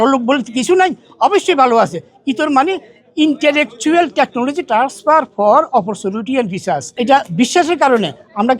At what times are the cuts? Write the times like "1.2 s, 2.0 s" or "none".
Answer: 6.9 s